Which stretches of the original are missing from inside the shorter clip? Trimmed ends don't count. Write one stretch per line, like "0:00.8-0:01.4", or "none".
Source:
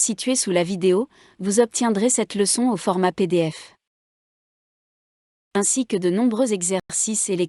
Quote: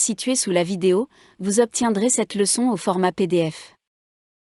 none